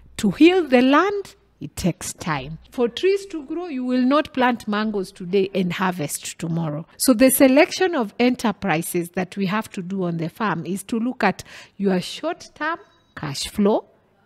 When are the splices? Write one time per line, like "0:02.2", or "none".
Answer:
0:02.6
0:06.9